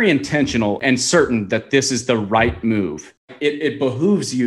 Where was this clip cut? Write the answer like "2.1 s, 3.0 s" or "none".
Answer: 0.8 s, 3.2 s